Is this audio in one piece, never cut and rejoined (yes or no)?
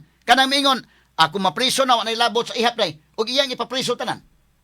yes